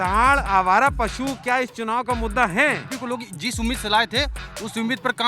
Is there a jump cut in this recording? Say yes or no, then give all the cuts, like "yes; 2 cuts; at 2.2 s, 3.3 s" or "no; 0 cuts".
yes; 1 cut; at 2.9 s